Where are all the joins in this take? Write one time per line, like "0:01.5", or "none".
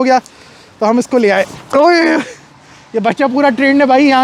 none